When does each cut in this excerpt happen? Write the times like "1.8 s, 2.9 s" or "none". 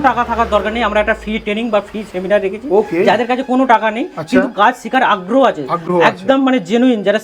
none